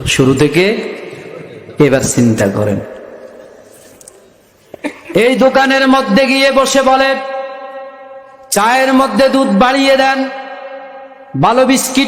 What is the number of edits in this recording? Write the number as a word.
zero